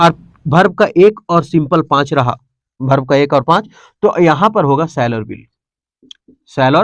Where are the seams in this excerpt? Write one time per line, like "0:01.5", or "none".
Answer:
none